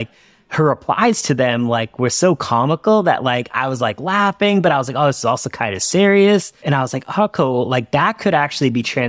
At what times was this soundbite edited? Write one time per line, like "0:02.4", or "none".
0:06.6